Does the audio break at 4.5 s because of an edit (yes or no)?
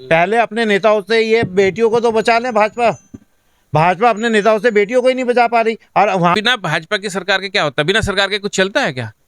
no